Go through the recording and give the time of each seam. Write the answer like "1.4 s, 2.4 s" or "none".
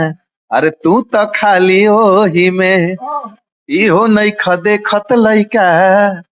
none